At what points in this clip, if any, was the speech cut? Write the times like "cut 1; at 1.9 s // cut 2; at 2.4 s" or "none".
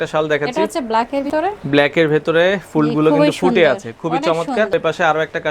cut 1; at 1.3 s // cut 2; at 4.7 s